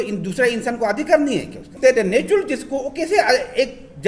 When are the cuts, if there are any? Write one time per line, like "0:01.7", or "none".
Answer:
0:01.7